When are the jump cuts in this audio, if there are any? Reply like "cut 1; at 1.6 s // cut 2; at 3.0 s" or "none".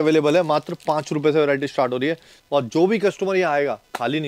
cut 1; at 2.3 s